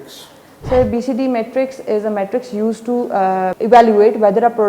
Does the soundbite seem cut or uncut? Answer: cut